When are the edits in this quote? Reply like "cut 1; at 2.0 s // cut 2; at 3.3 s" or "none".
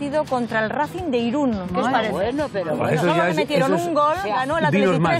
none

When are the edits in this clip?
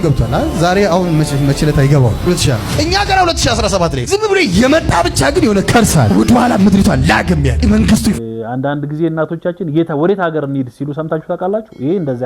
cut 1; at 8.2 s

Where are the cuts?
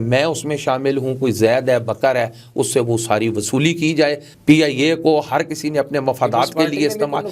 cut 1; at 4.3 s

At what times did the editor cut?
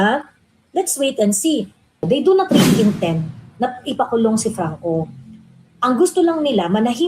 cut 1; at 2.0 s

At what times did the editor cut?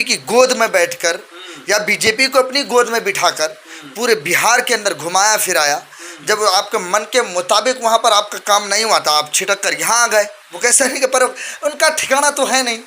cut 1; at 10.4 s

